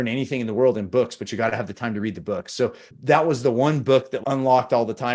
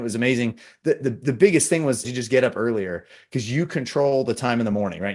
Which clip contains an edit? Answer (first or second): first